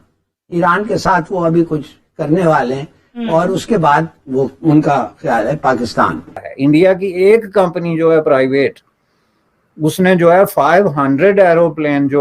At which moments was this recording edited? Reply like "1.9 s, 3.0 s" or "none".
6.4 s